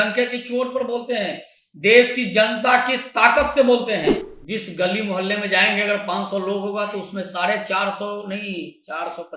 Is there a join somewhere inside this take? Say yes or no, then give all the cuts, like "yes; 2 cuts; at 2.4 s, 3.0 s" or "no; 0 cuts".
yes; 1 cut; at 4.3 s